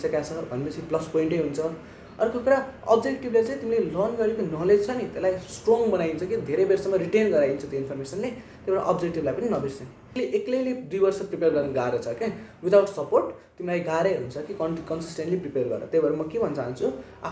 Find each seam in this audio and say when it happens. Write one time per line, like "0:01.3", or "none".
0:10.1

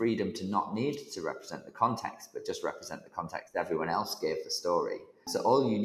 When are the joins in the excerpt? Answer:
none

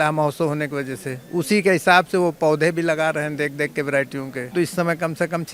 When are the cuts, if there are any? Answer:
0:04.5

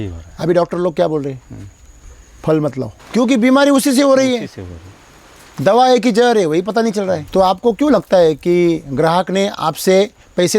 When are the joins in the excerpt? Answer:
0:02.9
0:07.2

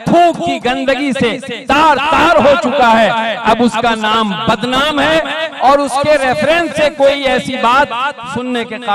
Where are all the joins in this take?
none

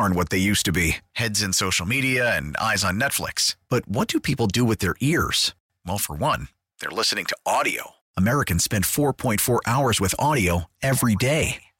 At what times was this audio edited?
none

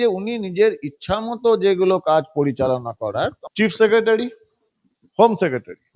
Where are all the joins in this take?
0:03.2

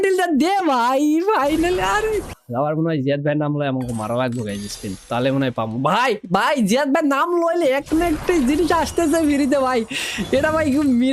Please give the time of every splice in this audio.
0:02.4

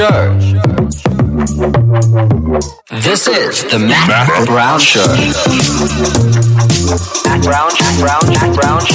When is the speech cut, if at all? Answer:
none

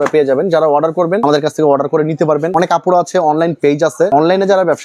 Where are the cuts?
0:01.2
0:02.5
0:04.1

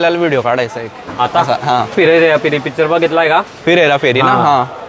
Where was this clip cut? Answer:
0:01.9

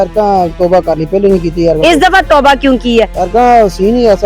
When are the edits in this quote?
0:03.2

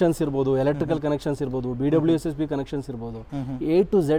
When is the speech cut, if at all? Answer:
none

